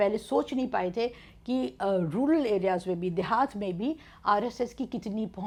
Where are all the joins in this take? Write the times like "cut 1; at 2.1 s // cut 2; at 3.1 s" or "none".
none